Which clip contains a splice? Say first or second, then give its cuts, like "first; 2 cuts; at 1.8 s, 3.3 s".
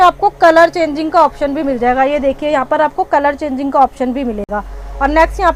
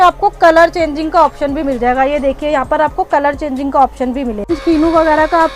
second; 1 cut; at 4.5 s